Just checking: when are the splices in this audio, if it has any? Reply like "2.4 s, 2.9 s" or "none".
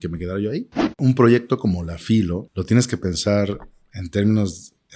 1.0 s, 2.5 s